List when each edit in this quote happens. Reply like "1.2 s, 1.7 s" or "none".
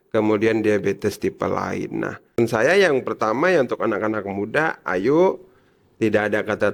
2.4 s

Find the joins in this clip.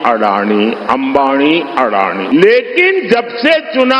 2.2 s

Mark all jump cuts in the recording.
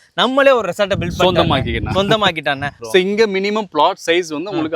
2.7 s

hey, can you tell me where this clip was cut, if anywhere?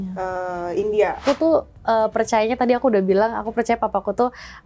1.2 s

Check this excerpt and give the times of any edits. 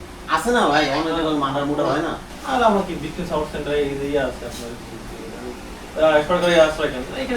2.3 s

